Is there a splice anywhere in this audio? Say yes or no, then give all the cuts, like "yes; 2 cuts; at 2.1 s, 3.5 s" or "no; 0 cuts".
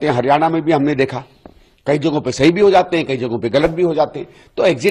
no; 0 cuts